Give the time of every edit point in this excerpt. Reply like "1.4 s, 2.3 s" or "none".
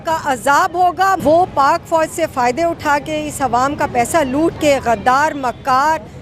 1.2 s